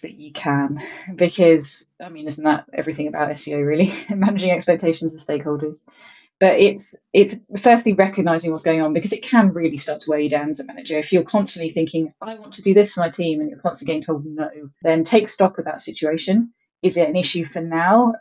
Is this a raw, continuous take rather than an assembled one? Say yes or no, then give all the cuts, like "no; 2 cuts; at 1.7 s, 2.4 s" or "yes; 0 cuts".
no; 2 cuts; at 14.8 s, 16.6 s